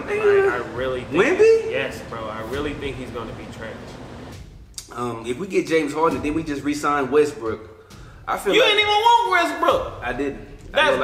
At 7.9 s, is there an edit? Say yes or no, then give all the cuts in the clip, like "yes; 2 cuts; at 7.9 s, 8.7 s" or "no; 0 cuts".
no; 1 cut; at 4.3 s